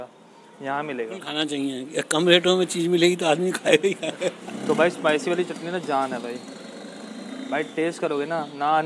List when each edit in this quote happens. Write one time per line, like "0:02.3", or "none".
0:01.3
0:04.5